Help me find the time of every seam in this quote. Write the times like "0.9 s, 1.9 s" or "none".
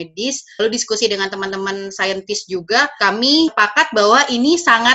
3.4 s